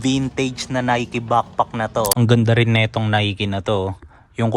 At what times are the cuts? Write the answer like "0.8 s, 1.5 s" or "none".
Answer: 2.1 s